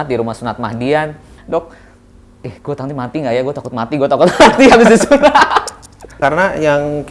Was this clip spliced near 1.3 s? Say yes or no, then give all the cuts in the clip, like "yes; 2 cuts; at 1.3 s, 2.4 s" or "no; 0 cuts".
yes; 2 cuts; at 1.3 s, 6.2 s